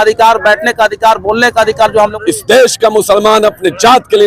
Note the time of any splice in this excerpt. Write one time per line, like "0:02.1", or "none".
0:02.2